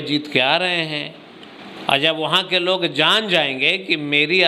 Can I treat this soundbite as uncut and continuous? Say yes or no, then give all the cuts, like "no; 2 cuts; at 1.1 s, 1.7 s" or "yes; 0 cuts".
yes; 0 cuts